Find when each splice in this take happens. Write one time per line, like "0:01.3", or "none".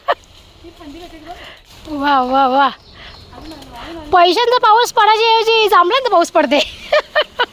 0:01.6